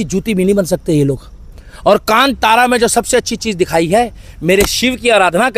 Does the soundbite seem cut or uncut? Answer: uncut